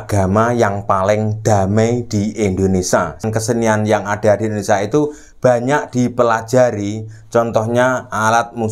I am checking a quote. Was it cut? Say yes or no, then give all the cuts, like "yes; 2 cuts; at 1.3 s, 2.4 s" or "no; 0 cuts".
yes; 1 cut; at 3.3 s